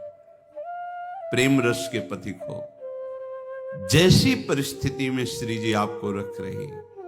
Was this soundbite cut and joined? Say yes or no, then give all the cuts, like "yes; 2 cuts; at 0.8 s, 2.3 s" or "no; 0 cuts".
yes; 1 cut; at 1.3 s